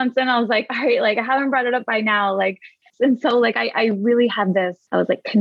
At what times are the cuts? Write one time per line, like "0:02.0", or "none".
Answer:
0:02.9